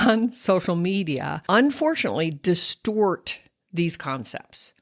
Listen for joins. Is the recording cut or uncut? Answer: cut